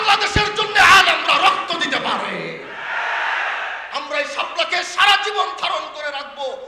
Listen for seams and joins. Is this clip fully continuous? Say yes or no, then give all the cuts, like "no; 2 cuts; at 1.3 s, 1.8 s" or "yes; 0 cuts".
yes; 0 cuts